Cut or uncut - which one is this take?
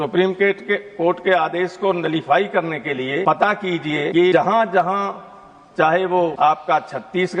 cut